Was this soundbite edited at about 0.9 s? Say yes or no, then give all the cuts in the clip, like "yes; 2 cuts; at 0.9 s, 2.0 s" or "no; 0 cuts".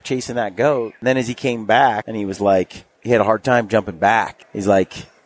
yes; 4 cuts; at 0.9 s, 2.0 s, 2.9 s, 4.4 s